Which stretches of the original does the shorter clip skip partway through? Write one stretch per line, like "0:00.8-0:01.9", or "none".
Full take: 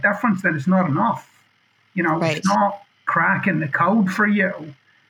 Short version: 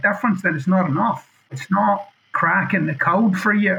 0:01.6-0:02.4